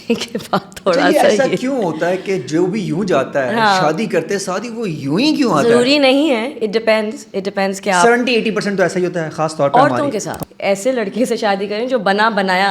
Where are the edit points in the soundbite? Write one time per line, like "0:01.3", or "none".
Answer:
0:10.3